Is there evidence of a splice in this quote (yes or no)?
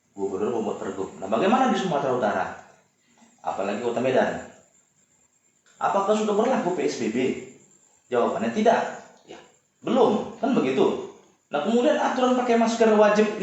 no